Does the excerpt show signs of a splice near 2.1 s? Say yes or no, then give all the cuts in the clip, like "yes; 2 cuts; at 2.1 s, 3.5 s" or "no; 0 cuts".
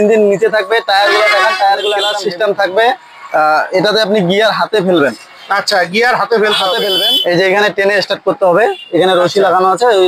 yes; 2 cuts; at 2.1 s, 6.9 s